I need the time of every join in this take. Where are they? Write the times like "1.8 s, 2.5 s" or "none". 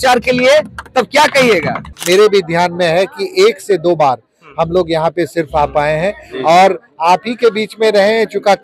1.9 s